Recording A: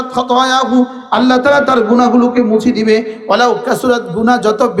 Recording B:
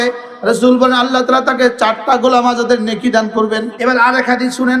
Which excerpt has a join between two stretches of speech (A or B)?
B